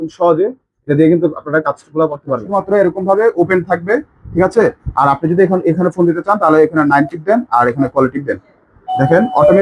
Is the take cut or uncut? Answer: cut